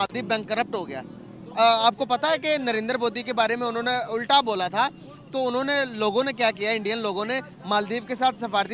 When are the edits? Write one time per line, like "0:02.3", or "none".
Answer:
none

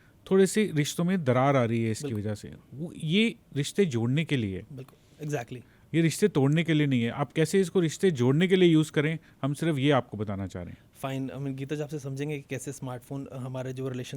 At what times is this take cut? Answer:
none

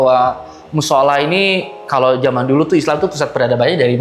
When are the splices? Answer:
none

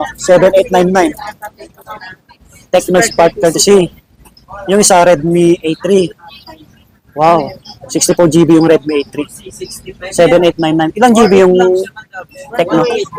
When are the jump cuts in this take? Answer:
none

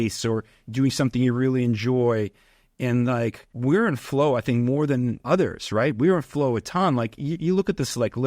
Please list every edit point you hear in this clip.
0:03.5
0:05.2

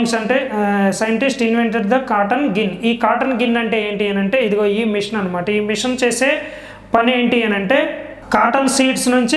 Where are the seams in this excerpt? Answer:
none

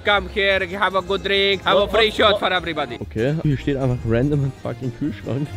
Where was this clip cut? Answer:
0:01.6
0:03.5

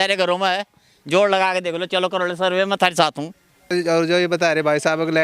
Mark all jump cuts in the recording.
0:03.7

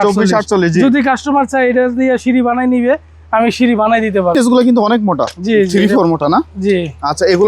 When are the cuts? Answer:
0:04.3

